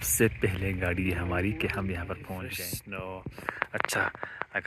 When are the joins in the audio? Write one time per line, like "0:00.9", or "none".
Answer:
0:02.4